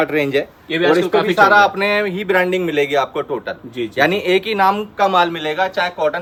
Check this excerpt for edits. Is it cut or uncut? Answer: uncut